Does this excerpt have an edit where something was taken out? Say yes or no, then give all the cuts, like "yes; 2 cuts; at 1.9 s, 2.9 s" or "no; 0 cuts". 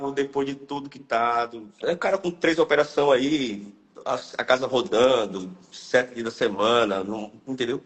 yes; 1 cut; at 1.8 s